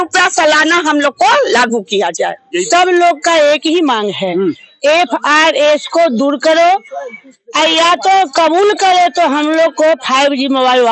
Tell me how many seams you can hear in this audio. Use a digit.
1